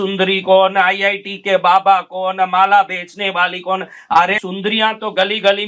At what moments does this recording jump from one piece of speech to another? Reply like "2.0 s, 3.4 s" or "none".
4.4 s